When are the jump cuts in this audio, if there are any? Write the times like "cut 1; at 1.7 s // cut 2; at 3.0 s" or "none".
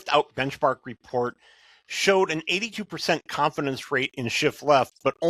none